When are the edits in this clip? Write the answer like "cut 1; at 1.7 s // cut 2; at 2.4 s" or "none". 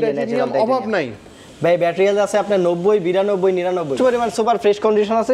cut 1; at 3.9 s